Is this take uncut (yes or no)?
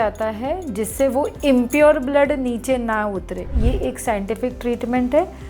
no